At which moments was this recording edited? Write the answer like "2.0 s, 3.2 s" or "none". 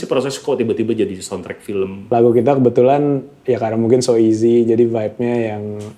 2.0 s